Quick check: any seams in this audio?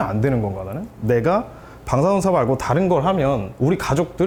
no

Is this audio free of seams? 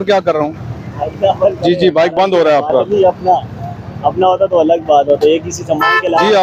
yes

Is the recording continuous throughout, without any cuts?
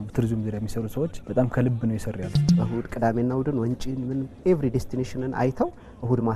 no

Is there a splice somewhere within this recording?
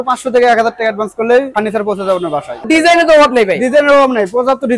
yes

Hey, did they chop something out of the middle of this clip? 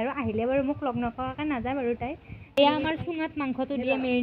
yes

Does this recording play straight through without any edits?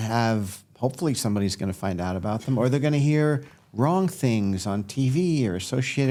yes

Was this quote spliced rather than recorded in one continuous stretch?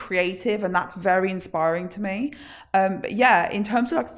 no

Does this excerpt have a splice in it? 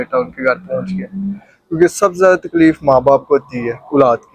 no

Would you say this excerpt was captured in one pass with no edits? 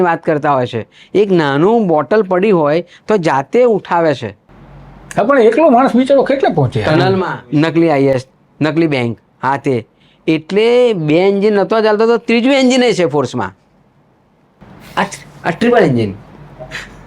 no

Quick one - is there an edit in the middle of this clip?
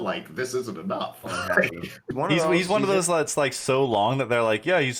yes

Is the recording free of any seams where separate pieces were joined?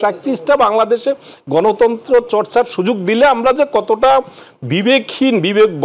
yes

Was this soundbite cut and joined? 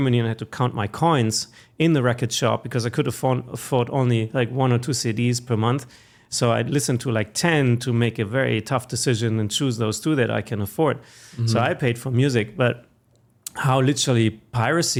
no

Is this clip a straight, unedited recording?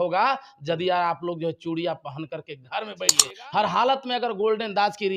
no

